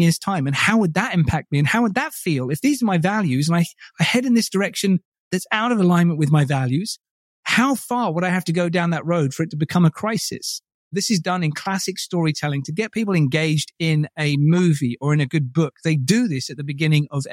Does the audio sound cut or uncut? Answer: cut